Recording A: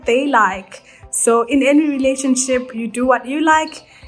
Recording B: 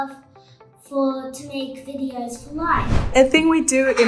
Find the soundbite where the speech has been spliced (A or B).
B